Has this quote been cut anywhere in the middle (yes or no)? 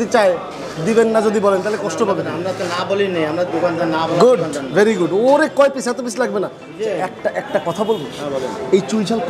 no